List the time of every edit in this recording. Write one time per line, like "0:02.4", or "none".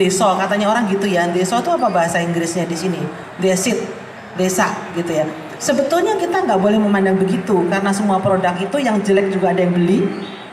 none